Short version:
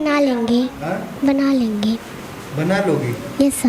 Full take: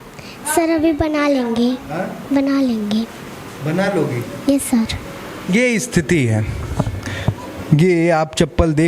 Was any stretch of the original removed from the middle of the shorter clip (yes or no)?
no